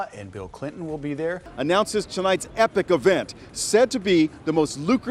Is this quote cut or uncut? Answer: cut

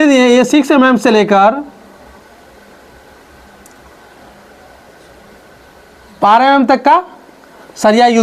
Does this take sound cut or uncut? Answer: uncut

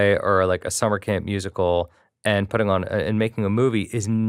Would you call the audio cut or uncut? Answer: uncut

